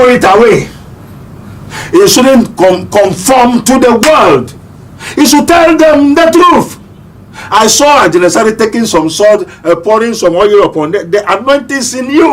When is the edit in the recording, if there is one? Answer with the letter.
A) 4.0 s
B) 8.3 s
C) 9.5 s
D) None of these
D